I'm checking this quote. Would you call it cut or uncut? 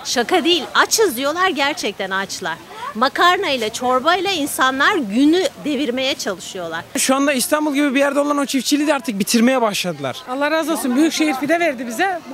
cut